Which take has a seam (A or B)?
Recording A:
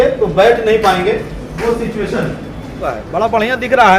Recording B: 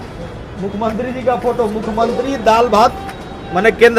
A